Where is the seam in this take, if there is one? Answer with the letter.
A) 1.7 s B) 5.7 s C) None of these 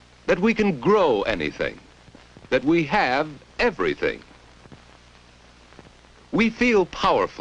A